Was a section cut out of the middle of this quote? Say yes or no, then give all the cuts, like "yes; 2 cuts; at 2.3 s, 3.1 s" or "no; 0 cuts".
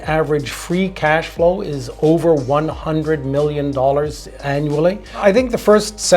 yes; 1 cut; at 5.2 s